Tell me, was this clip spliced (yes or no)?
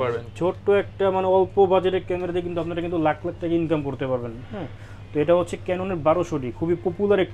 no